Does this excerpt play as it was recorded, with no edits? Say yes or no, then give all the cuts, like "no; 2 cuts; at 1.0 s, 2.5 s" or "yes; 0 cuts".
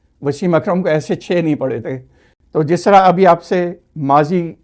yes; 0 cuts